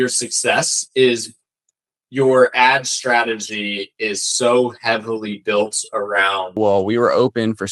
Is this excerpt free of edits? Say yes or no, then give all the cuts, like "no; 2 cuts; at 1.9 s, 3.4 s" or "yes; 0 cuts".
no; 1 cut; at 6.6 s